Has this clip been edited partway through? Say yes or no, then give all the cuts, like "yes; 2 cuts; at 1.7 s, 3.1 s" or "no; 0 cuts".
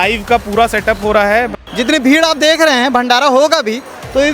yes; 1 cut; at 1.5 s